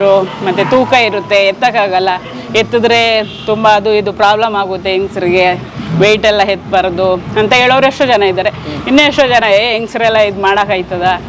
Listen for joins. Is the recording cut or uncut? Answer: uncut